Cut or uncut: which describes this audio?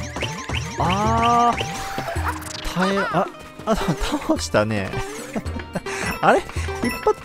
uncut